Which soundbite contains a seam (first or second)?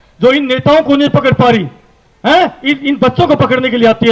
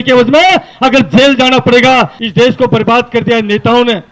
second